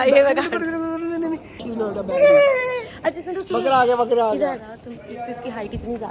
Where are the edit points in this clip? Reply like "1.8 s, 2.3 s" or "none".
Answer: 1.6 s, 2.9 s, 4.7 s